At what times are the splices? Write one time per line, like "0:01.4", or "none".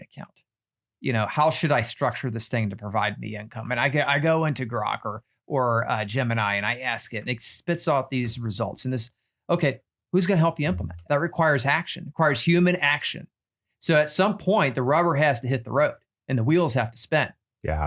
0:09.9
0:10.9